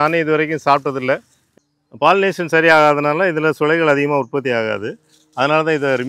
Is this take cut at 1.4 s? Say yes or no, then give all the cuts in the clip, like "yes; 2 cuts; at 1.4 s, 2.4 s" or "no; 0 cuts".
yes; 1 cut; at 1.4 s